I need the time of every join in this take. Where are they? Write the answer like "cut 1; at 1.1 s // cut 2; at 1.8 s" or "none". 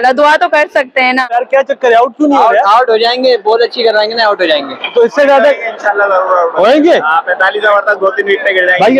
cut 1; at 1.3 s